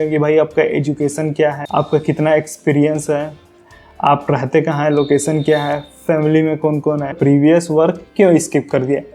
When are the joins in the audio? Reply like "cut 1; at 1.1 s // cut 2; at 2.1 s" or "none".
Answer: cut 1; at 1.6 s // cut 2; at 7.2 s